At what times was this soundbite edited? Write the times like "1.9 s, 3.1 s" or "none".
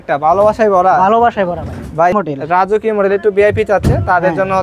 2.1 s

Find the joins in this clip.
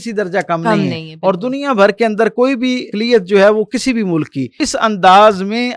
2.9 s, 4.6 s

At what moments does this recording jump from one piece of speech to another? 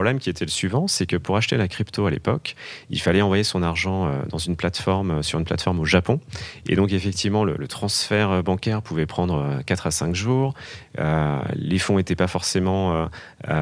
none

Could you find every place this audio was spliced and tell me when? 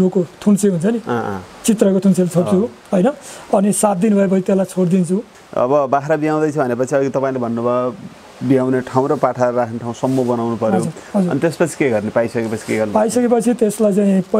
5.4 s, 11.0 s

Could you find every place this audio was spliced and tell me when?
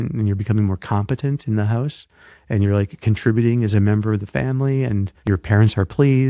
5.1 s

